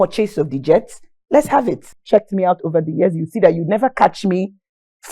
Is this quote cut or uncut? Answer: cut